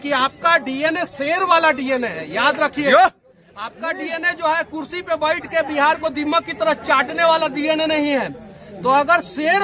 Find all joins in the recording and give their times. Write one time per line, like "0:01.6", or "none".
none